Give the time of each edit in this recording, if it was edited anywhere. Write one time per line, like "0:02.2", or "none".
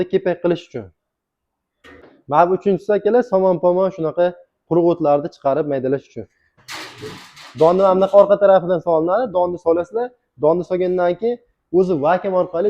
0:02.0
0:06.5